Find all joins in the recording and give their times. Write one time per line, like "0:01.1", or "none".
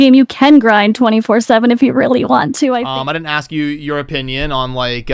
0:02.9

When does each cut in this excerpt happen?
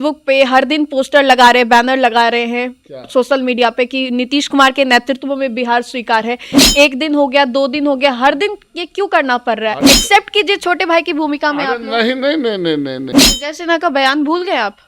0:13.2

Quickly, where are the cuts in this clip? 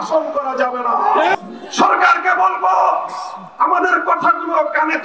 0:01.3

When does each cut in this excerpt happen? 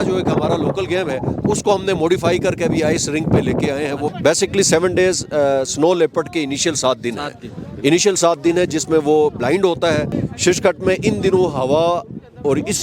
0:04.1
0:10.1

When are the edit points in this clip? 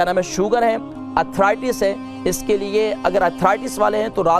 none

